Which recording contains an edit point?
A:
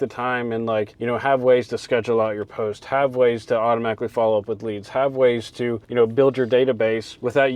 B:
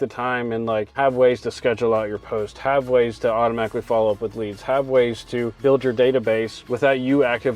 B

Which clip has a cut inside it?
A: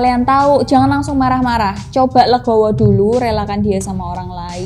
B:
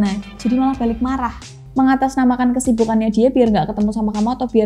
B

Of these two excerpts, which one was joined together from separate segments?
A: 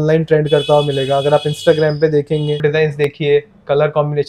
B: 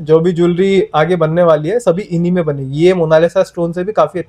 A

